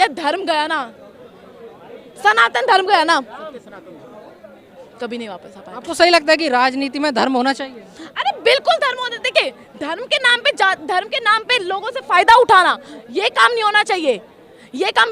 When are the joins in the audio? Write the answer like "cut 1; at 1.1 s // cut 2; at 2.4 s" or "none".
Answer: none